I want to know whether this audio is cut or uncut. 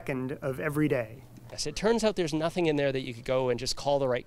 cut